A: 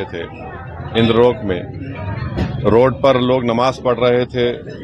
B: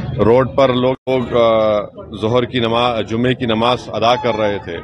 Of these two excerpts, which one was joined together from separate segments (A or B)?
B